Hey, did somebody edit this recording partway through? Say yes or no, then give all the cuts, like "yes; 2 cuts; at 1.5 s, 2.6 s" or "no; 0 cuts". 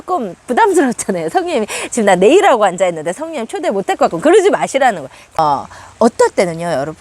yes; 1 cut; at 5.4 s